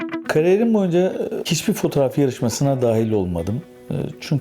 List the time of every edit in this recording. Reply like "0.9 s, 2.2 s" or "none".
1.5 s

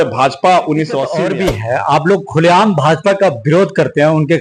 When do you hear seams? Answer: 1.1 s

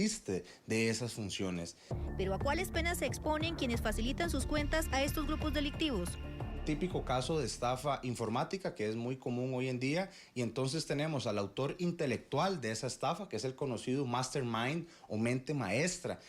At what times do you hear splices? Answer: 1.9 s

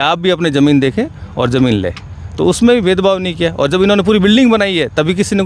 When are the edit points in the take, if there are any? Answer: none

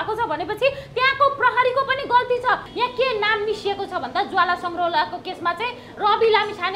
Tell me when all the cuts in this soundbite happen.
2.7 s

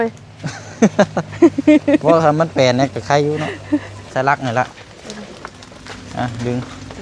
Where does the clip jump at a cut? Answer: 4.1 s

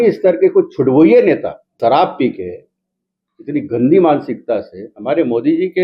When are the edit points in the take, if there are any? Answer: 1.7 s

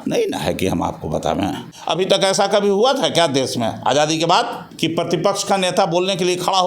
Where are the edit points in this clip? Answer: 1.7 s, 4.6 s

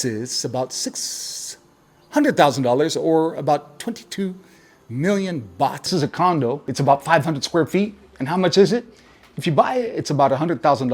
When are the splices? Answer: 6.2 s

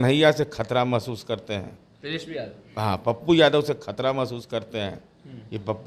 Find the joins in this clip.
none

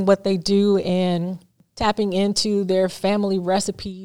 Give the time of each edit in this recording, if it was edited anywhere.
1.6 s

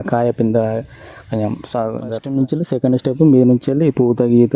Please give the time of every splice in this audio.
2.1 s

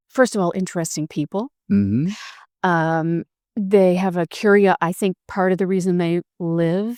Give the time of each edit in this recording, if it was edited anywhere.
none

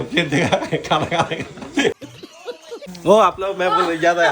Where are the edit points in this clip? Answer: 2.8 s

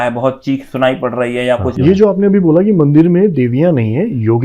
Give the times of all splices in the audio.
1.7 s

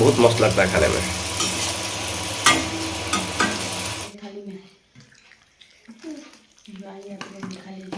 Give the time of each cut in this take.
4.1 s

